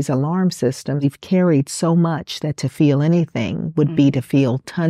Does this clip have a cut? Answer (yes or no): yes